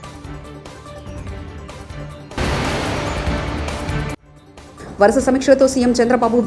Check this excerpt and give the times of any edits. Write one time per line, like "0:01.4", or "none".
0:00.8
0:02.3
0:04.1